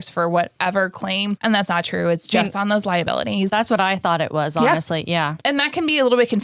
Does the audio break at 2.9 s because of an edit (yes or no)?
no